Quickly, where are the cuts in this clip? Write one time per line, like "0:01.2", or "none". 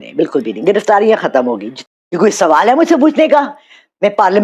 0:01.7